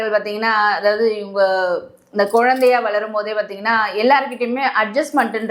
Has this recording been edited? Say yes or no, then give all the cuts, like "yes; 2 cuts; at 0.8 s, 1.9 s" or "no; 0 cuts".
no; 0 cuts